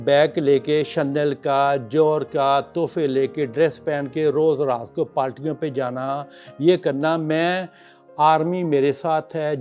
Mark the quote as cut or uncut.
uncut